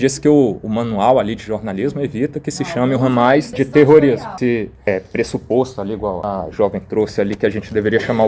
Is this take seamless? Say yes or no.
no